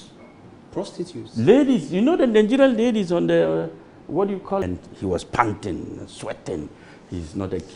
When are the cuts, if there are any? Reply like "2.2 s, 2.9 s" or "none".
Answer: 4.6 s